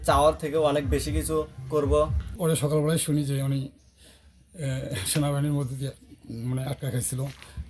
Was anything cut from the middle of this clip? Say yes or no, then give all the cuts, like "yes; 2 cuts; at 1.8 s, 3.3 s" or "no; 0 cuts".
yes; 1 cut; at 2.2 s